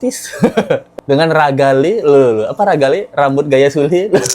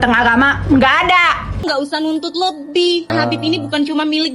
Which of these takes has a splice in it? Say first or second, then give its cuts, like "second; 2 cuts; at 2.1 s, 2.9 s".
second; 2 cuts; at 1.6 s, 3.1 s